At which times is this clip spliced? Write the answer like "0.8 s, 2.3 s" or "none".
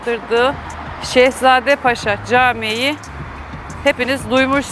none